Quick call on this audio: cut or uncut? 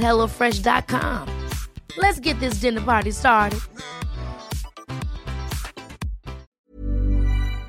cut